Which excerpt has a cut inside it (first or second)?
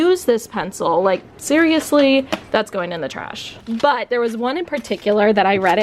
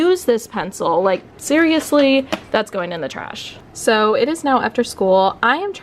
first